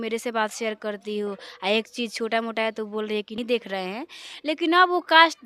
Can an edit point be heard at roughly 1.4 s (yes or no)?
no